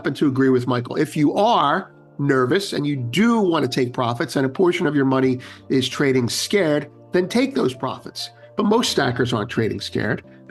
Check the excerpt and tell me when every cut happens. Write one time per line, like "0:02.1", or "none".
none

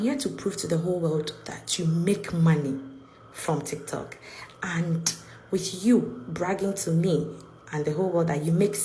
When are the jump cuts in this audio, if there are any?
none

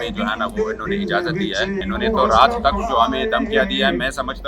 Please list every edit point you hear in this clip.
0:01.8

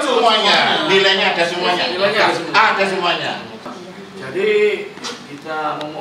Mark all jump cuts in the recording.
0:03.7

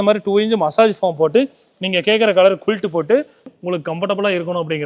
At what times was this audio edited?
0:03.5

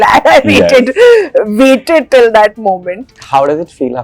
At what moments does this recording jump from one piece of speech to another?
0:03.1

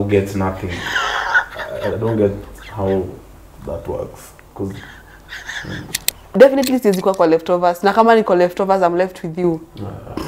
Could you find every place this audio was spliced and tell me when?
0:06.3

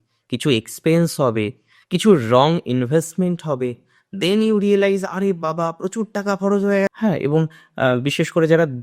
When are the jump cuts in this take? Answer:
0:06.9

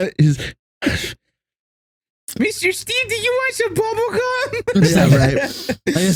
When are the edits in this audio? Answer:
none

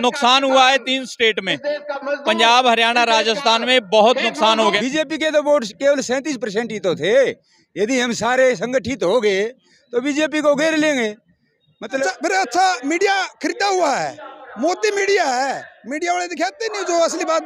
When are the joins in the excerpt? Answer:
0:04.8
0:12.0

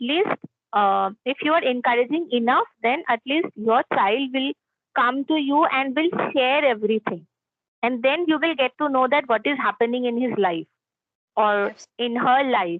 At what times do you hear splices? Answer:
none

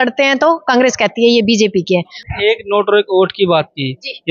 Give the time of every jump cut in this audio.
0:02.1

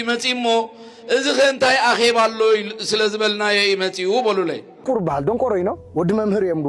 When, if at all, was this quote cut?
0:04.8

